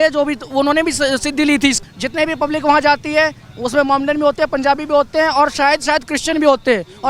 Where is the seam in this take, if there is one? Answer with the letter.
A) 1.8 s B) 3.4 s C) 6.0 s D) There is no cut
A